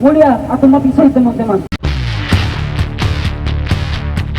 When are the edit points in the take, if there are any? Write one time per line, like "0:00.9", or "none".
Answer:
0:01.7